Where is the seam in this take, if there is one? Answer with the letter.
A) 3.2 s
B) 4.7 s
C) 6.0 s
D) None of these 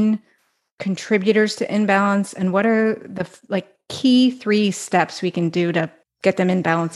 C